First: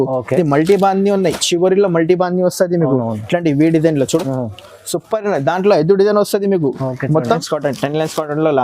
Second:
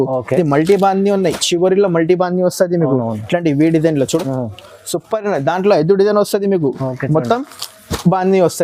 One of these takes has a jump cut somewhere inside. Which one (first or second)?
first